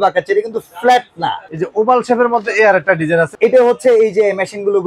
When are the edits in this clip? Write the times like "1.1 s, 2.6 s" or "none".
1.6 s, 3.3 s